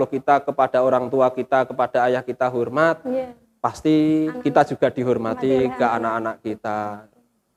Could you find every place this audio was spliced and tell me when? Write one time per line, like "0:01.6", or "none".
none